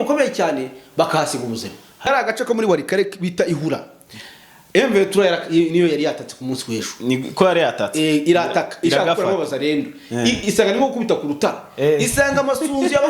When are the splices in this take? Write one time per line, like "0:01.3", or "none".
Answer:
0:02.0